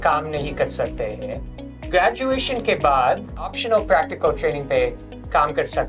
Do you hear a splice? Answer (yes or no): yes